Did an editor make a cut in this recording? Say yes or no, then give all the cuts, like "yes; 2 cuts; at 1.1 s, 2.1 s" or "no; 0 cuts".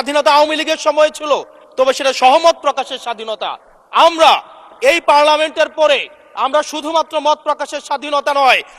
no; 0 cuts